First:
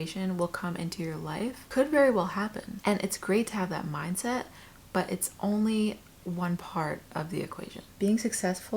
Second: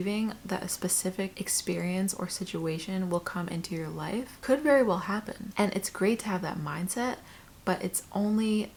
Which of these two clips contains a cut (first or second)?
first